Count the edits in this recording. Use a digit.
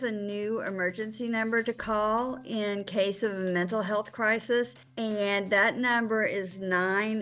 1